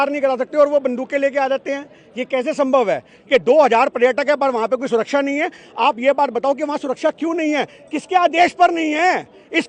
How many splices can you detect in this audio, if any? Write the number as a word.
one